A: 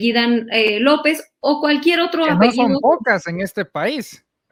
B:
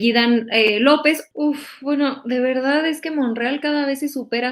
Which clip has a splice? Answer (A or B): B